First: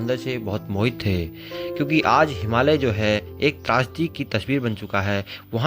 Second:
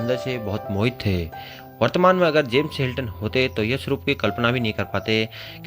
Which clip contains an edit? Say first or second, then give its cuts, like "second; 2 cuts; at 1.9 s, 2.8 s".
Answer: first; 1 cut; at 1.6 s